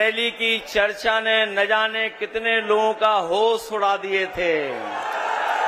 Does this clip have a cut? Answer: no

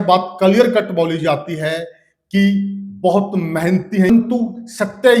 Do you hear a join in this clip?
yes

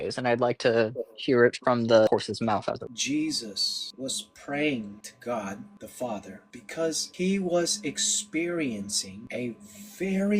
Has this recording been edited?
yes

